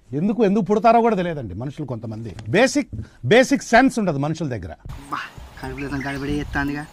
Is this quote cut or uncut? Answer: cut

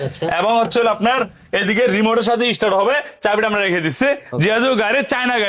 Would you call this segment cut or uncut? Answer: uncut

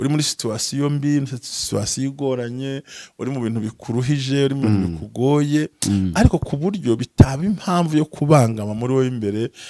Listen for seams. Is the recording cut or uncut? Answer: uncut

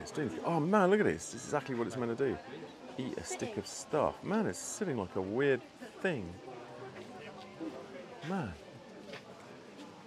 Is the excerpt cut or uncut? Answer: uncut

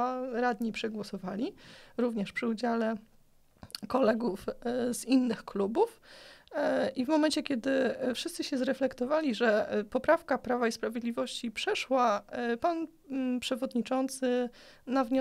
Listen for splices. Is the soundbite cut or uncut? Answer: uncut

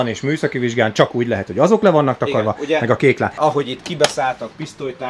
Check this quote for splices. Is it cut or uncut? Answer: cut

